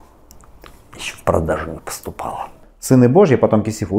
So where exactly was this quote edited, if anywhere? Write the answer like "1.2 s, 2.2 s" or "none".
2.7 s

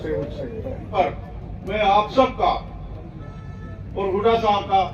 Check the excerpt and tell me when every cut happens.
0.9 s

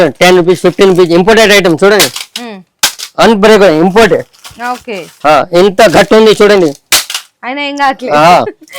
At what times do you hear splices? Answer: none

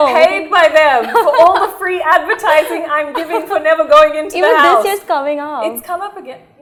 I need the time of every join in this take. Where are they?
none

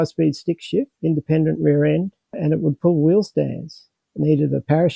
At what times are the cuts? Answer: 0.9 s, 4.2 s

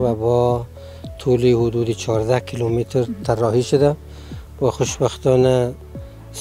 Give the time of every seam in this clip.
none

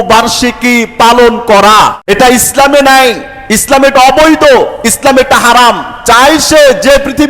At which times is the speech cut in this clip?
2.0 s

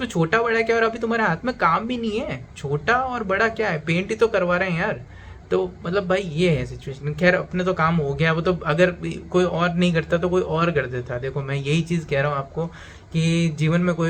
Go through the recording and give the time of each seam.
none

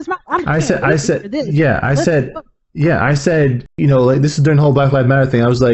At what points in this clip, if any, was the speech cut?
3.7 s

